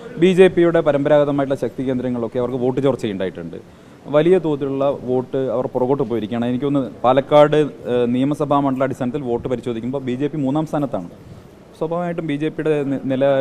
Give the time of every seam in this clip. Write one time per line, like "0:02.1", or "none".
none

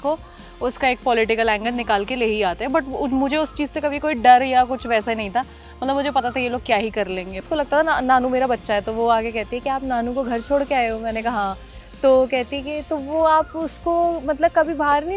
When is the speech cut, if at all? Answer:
0:07.4

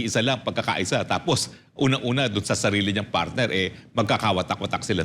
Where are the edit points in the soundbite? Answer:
none

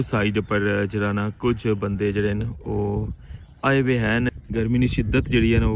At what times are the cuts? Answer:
0:04.3

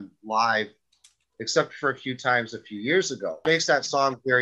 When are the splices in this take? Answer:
0:03.4

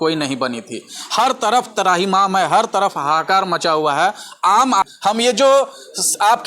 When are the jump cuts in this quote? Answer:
0:04.8

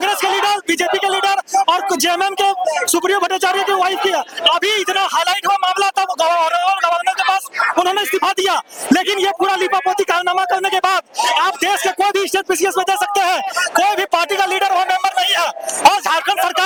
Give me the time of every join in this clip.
none

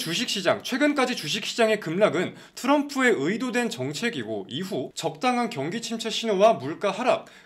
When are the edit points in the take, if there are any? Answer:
none

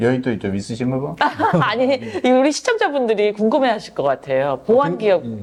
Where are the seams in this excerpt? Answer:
none

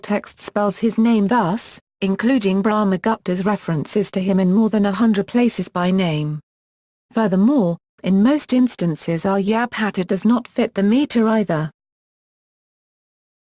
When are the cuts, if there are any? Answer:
0:11.2

